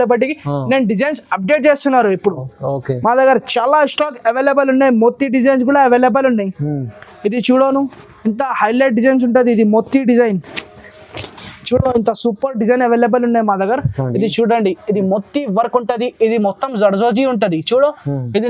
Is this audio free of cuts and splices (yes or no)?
yes